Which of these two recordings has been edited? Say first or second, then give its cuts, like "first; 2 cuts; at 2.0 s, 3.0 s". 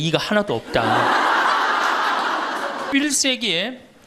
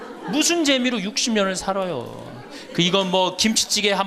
first; 1 cut; at 2.9 s